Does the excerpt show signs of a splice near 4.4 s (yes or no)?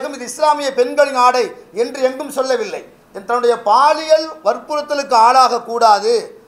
no